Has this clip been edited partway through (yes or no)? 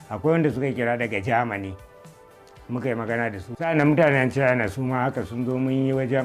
yes